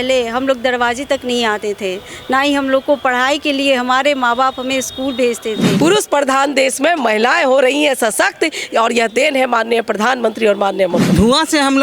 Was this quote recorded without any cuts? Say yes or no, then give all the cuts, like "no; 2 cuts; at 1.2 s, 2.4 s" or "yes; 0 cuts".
no; 2 cuts; at 5.7 s, 11.0 s